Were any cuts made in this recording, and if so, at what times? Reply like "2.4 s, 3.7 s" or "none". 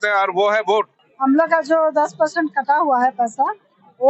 1.0 s